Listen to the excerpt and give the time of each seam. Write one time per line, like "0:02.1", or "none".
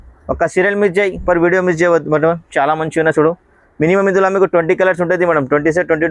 none